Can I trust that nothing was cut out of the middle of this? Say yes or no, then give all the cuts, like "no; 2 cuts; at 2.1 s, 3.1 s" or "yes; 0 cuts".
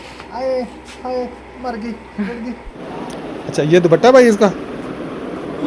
no; 1 cut; at 2.8 s